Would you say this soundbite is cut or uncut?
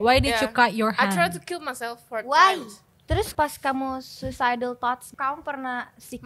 cut